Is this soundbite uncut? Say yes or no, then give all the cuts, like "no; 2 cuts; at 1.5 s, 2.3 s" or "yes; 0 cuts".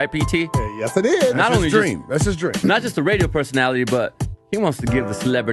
no; 1 cut; at 2.4 s